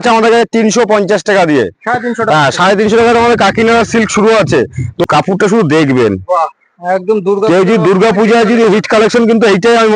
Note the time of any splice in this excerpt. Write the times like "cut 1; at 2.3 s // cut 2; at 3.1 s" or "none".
cut 1; at 5.0 s